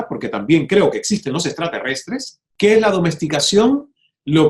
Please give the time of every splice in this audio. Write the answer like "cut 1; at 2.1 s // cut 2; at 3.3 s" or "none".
cut 1; at 2.4 s